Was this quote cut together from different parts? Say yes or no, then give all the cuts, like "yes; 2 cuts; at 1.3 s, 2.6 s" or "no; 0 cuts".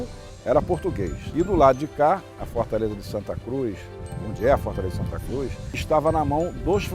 yes; 2 cuts; at 1.2 s, 5.7 s